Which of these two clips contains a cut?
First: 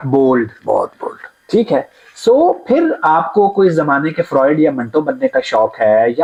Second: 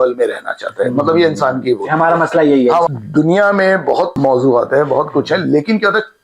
second; 2 cuts; at 2.9 s, 4.1 s

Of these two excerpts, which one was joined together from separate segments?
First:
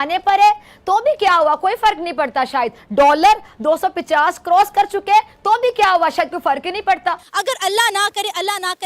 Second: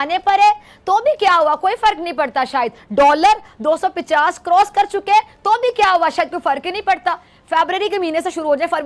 first; 1 cut; at 7.2 s

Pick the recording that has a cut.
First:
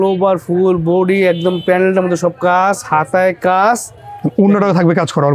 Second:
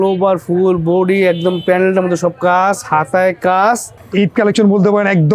second; 1 cut; at 3.9 s

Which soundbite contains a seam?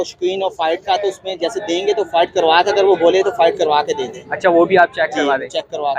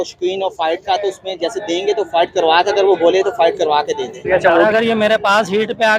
second; 1 cut; at 4.2 s

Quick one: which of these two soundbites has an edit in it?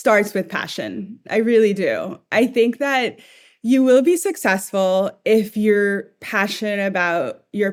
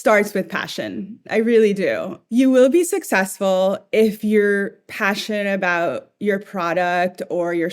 second; 1 cut; at 2.1 s

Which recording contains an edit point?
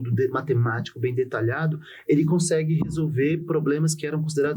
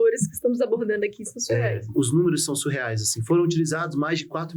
second; 1 cut; at 1.9 s

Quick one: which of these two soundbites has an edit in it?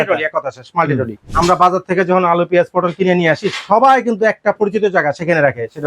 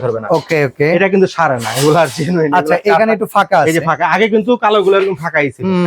first; 1 cut; at 1.2 s

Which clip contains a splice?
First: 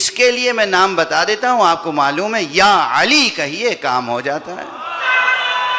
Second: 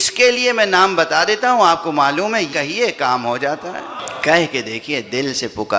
second; 2 cuts; at 2.5 s, 4.0 s

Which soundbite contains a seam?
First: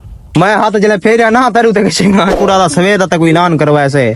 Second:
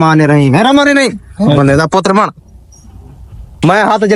first; 1 cut; at 2.3 s

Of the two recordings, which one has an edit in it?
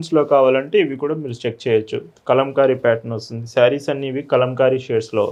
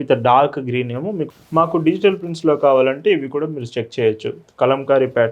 second; 1 cut; at 1.3 s

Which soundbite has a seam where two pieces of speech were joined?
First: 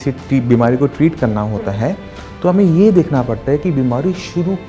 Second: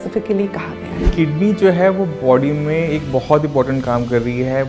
second; 1 cut; at 1.0 s

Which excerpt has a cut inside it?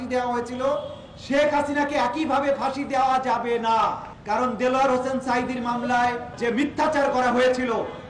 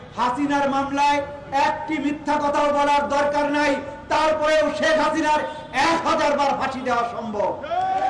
first; 2 cuts; at 4.1 s, 6.3 s

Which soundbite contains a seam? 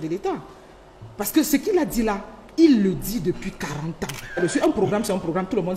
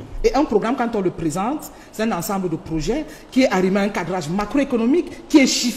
first; 1 cut; at 4.4 s

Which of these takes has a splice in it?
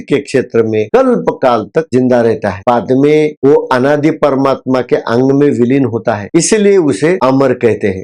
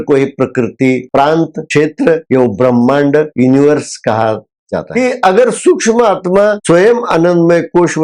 second; 3 cuts; at 2.2 s, 3.3 s, 4.9 s

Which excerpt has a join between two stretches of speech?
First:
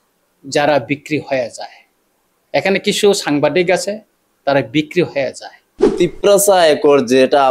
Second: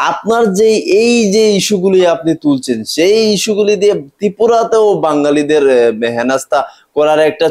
first; 1 cut; at 5.9 s

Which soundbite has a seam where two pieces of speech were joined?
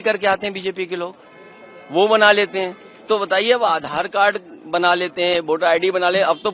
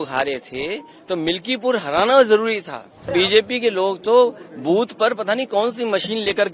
second; 1 cut; at 3.1 s

